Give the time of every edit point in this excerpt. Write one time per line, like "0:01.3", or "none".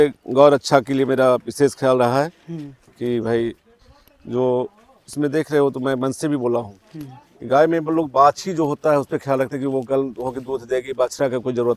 none